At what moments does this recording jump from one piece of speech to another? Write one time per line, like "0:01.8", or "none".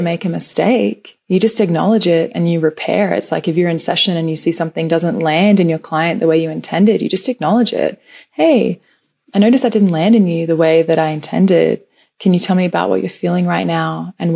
none